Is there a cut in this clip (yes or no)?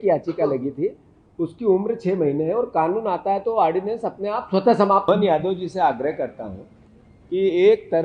yes